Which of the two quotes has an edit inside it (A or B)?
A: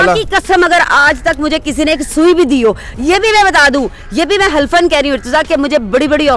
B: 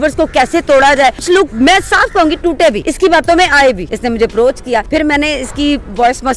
B